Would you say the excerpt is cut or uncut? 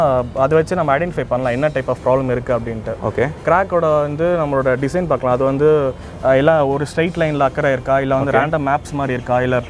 uncut